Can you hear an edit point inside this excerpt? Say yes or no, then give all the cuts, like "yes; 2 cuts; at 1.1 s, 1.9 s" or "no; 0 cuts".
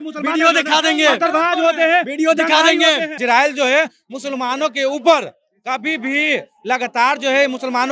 yes; 1 cut; at 3.1 s